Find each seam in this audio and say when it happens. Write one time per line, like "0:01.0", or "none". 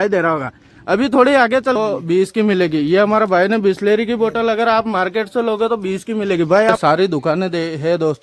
0:01.8
0:06.8